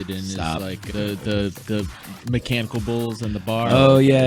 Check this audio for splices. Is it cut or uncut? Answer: uncut